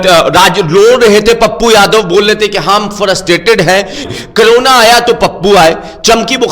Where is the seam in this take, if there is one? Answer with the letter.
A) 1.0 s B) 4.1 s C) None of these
B